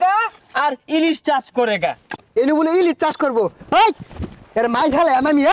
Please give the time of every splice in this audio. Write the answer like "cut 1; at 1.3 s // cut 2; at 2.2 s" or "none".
cut 1; at 2.2 s